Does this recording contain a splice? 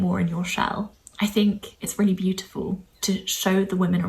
yes; 3 cuts; at 1.0 s, 1.8 s, 2.9 s

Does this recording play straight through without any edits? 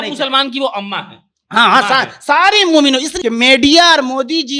no; 1 cut; at 3.1 s

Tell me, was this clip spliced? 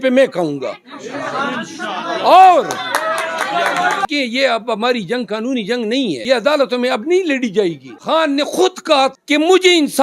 yes; 4 cuts; at 4.0 s, 6.2 s, 7.9 s, 9.1 s

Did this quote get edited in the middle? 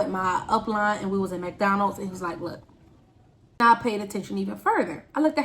yes; 1 cut; at 3.6 s

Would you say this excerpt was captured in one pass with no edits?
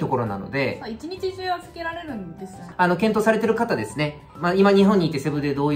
no; 2 cuts; at 2.6 s, 4.3 s

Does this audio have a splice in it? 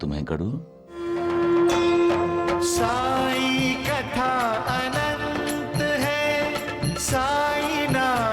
yes; 1 cut; at 1.2 s

